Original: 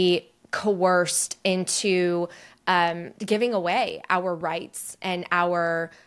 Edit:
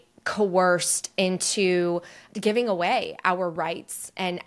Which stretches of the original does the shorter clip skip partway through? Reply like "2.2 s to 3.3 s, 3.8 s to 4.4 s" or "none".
2.5 s to 3.1 s